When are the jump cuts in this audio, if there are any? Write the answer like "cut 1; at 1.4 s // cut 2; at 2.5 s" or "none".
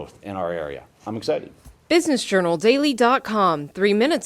cut 1; at 1.8 s